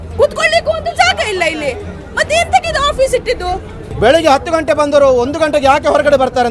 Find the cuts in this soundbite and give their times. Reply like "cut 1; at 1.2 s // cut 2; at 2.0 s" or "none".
cut 1; at 3.8 s